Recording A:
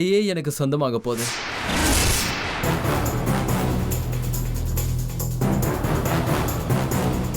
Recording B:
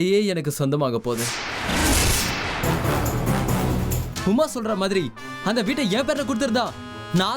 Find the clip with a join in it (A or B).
B